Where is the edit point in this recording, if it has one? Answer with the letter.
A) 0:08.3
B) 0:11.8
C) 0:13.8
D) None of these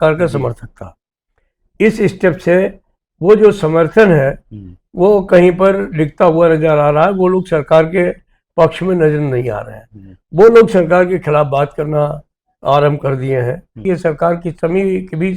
C